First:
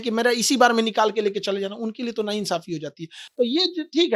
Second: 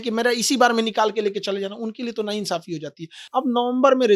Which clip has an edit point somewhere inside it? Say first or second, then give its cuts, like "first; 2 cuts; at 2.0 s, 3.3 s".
second; 1 cut; at 3.1 s